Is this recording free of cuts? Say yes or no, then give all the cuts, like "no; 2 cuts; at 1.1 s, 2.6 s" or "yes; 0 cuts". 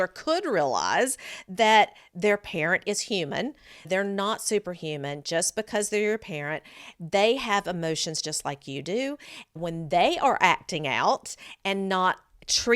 no; 3 cuts; at 3.9 s, 6.9 s, 9.6 s